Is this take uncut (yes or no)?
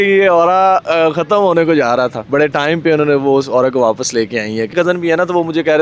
no